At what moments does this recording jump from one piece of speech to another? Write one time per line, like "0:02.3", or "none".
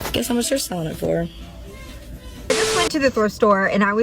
0:02.4